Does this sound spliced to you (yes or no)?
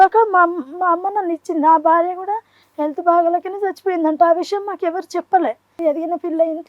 yes